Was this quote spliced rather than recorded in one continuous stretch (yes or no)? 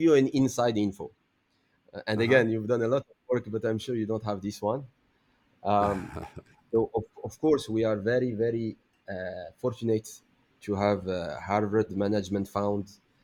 no